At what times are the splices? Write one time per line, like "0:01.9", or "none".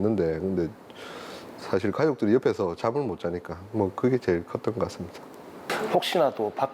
0:05.6